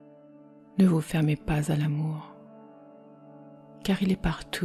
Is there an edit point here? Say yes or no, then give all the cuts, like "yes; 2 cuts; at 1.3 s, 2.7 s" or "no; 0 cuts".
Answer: yes; 3 cuts; at 0.8 s, 2.2 s, 3.8 s